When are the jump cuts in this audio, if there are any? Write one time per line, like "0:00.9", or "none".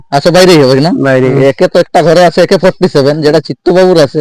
0:01.3